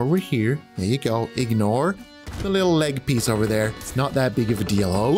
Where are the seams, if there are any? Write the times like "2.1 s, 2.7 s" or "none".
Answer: none